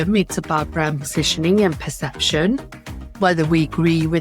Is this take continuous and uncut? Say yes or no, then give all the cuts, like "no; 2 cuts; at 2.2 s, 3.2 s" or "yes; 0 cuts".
yes; 0 cuts